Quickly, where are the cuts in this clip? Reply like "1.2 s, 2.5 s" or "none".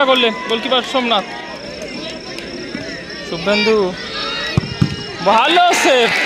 1.5 s